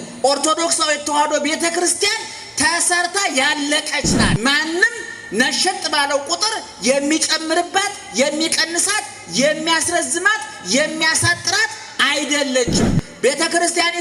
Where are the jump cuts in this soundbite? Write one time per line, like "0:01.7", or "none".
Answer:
0:04.3